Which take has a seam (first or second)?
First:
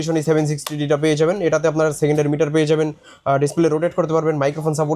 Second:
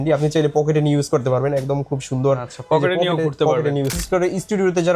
second